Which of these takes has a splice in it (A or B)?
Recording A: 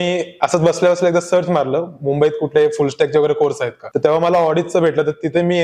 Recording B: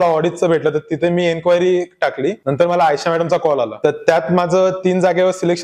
B